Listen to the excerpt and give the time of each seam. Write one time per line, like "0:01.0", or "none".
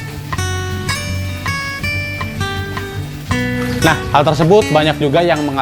0:03.8